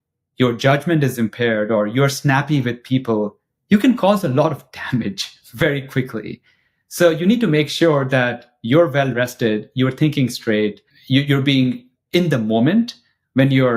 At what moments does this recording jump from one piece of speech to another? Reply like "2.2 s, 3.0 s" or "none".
10.8 s

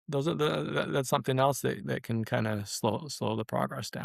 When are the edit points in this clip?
none

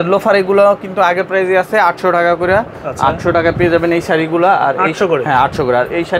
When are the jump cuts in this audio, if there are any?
none

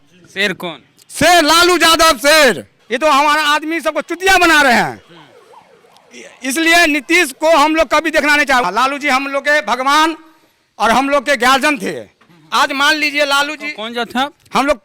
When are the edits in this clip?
2.7 s, 8.6 s

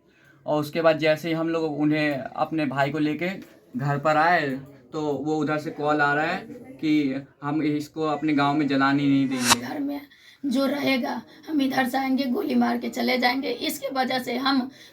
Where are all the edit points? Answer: 9.6 s

